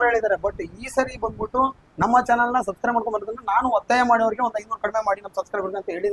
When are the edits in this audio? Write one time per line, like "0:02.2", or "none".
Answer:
none